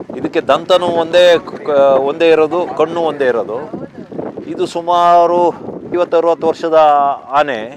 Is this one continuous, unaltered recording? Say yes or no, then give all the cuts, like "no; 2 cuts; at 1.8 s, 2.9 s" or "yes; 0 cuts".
yes; 0 cuts